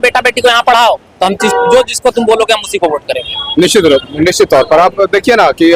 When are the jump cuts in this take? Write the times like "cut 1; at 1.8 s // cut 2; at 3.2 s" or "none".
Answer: none